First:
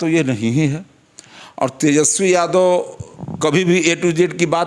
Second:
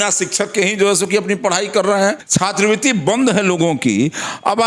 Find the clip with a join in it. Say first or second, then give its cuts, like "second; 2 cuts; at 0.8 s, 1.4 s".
second; 1 cut; at 2.2 s